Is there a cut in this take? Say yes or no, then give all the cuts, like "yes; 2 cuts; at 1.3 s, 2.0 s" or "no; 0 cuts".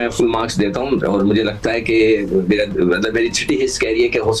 no; 0 cuts